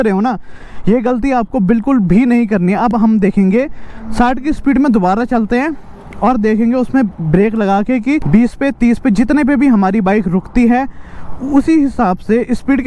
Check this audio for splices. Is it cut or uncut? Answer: uncut